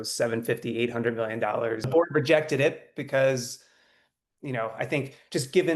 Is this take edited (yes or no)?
yes